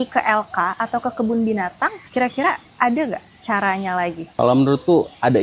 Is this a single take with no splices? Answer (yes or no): no